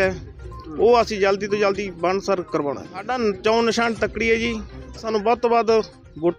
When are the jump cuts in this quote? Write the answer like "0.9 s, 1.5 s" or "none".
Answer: 3.1 s, 5.0 s